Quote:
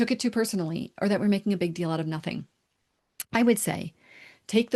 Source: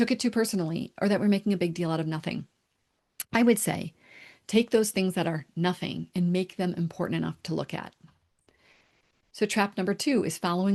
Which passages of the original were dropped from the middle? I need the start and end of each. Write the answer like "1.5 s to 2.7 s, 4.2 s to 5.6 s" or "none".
none